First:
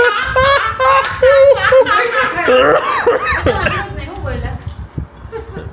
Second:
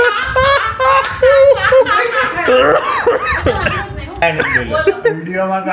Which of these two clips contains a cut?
second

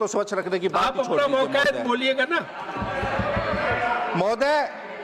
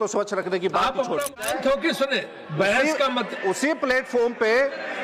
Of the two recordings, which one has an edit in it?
second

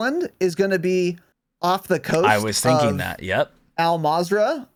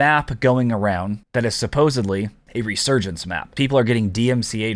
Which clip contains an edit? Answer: second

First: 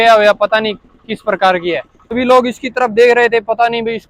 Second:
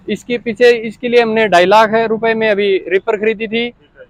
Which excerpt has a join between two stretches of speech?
first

